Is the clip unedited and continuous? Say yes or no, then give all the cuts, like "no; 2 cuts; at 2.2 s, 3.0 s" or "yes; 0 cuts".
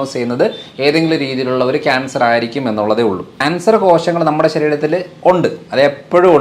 no; 1 cut; at 3.3 s